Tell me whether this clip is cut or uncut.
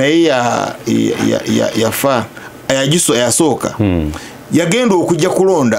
uncut